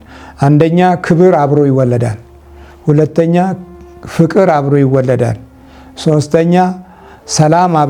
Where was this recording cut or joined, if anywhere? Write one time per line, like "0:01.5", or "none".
none